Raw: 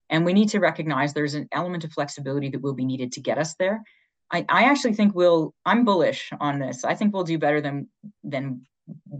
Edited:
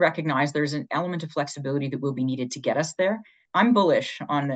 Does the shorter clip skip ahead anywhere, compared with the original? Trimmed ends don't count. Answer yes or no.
yes